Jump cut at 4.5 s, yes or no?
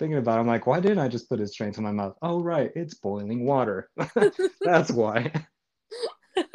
no